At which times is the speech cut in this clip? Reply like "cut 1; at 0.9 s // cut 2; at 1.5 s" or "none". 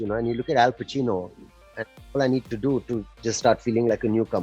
none